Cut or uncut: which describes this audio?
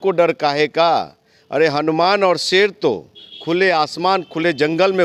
uncut